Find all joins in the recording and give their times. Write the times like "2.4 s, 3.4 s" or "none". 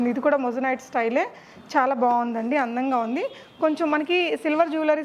none

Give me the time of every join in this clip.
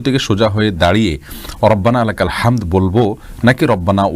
none

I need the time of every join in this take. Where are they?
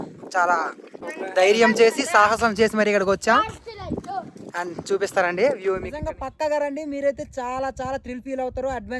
1.0 s, 5.9 s

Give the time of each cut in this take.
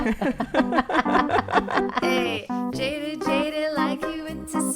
1.9 s

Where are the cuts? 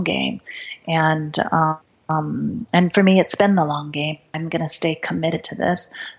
1.9 s, 4.3 s

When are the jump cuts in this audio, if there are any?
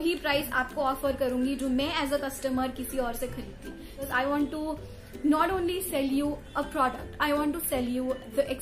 4.1 s

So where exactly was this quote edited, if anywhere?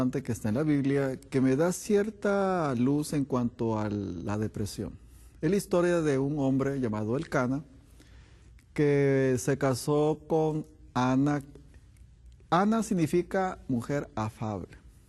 13.3 s

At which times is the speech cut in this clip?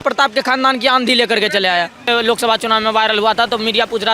2.1 s

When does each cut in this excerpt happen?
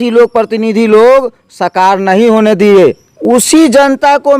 3.1 s

